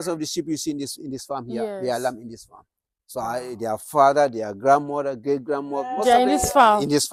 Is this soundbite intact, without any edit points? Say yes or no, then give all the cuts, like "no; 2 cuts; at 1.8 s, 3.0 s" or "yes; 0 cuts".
yes; 0 cuts